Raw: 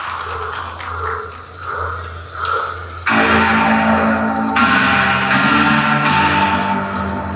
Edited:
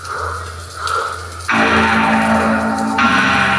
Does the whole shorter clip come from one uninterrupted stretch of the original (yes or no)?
yes